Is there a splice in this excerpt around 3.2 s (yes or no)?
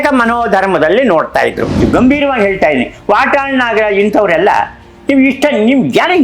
no